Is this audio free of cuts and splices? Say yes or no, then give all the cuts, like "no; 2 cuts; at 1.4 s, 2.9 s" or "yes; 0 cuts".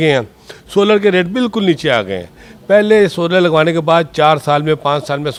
yes; 0 cuts